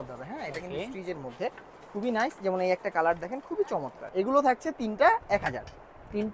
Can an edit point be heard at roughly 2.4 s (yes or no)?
no